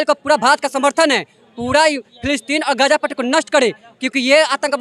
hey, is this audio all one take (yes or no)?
yes